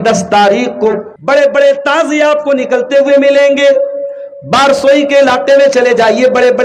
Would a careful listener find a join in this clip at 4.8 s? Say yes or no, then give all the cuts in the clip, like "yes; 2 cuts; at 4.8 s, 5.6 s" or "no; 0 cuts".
no; 1 cut; at 1.1 s